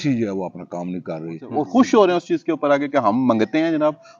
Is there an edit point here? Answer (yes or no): yes